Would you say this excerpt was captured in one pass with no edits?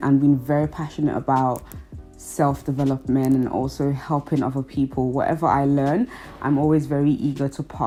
yes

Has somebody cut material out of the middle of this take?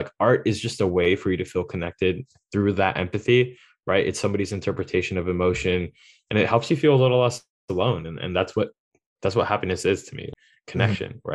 yes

